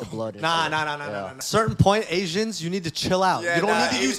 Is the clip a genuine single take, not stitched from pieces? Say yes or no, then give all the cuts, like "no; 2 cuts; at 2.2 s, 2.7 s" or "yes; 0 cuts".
no; 1 cut; at 1.4 s